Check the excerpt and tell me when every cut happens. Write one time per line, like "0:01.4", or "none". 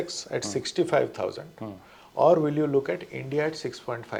none